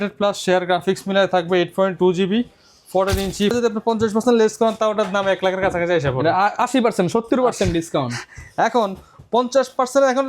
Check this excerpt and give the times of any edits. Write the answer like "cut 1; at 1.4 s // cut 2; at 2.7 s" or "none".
cut 1; at 3.5 s

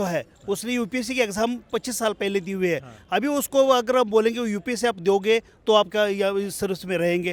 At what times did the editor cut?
none

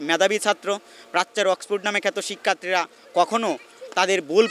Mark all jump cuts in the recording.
none

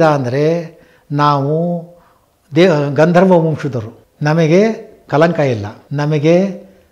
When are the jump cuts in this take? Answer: cut 1; at 5.8 s

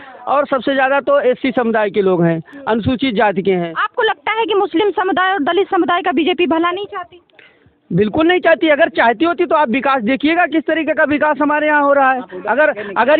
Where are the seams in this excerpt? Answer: none

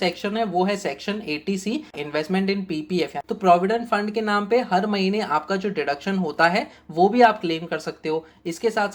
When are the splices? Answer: cut 1; at 2.0 s // cut 2; at 3.2 s

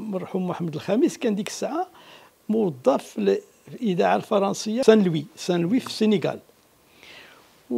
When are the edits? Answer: cut 1; at 4.8 s

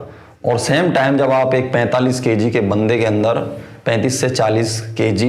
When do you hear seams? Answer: none

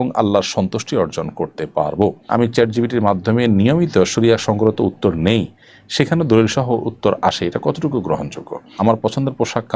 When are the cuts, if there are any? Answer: cut 1; at 2.3 s // cut 2; at 8.8 s

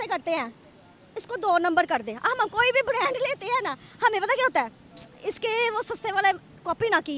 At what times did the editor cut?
none

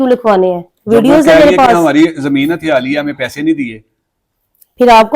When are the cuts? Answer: none

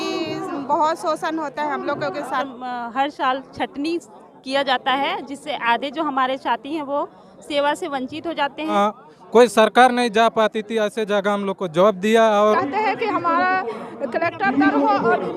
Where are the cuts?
cut 1; at 2.5 s // cut 2; at 8.7 s // cut 3; at 12.6 s

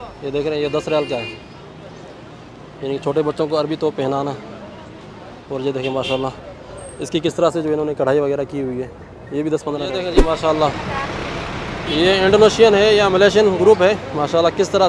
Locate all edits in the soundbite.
cut 1; at 10.1 s

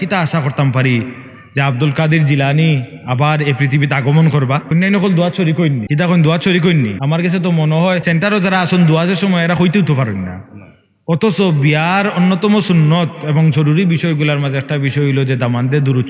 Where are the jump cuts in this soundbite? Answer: cut 1; at 4.7 s // cut 2; at 5.8 s // cut 3; at 7.0 s // cut 4; at 8.0 s

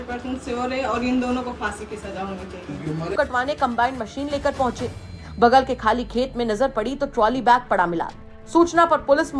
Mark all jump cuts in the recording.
cut 1; at 3.1 s

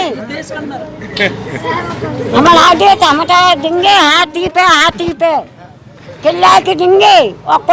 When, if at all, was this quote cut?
none

